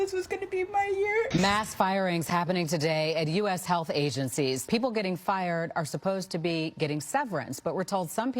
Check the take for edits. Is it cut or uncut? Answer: cut